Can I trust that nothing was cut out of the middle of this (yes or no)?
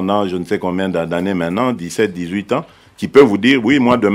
yes